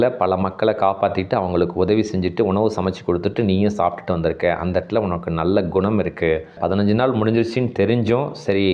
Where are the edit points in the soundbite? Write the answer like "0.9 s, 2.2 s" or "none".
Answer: 6.5 s